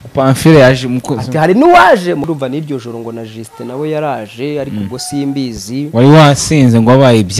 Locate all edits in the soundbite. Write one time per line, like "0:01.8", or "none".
0:02.2